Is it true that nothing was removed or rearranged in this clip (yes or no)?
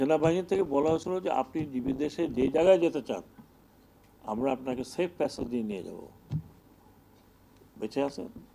yes